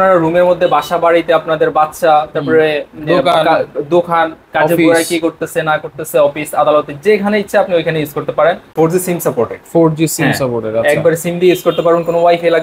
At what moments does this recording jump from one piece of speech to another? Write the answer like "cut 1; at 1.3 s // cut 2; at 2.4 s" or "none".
cut 1; at 8.7 s